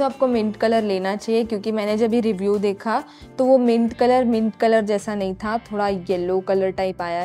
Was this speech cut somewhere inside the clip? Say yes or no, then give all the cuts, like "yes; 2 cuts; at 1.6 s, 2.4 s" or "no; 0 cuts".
no; 0 cuts